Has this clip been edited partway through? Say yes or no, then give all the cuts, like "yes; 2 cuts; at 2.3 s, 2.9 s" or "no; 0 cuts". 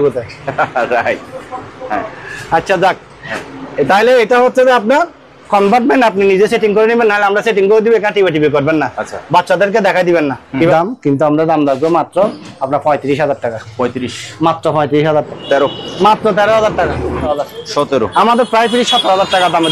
yes; 3 cuts; at 10.7 s, 15.3 s, 17.3 s